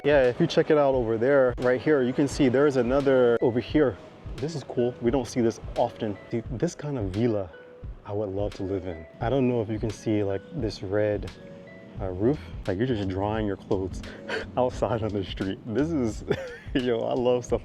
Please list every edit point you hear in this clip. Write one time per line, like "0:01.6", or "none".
0:01.6
0:03.4
0:06.3
0:09.1
0:12.5